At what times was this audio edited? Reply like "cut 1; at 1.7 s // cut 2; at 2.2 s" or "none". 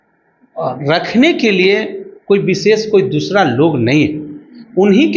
none